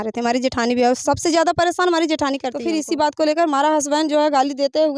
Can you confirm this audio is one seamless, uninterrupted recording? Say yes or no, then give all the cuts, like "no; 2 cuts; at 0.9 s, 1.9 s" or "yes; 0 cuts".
no; 1 cut; at 2.5 s